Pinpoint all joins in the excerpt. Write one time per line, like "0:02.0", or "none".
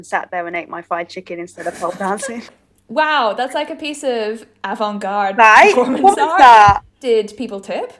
0:02.5
0:06.9